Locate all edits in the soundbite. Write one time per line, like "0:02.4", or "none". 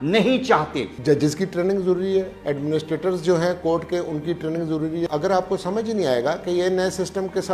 0:00.9
0:05.1